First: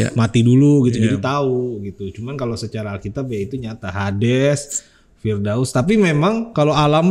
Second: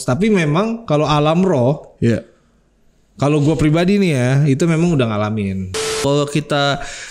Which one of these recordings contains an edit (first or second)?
second